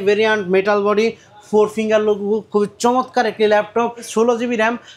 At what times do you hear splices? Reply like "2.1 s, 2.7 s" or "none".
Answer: 4.1 s